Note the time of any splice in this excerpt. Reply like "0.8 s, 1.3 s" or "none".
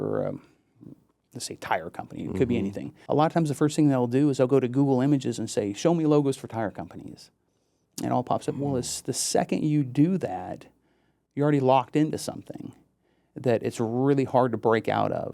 2.9 s